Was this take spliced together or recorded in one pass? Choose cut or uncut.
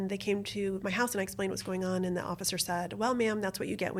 uncut